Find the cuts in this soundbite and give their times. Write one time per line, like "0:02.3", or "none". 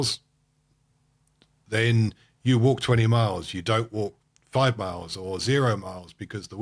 none